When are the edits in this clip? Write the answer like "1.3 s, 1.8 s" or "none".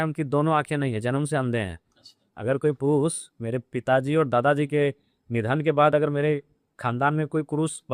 none